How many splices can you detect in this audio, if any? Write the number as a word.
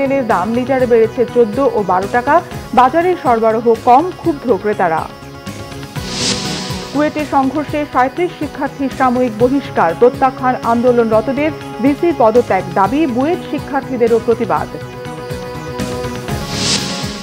zero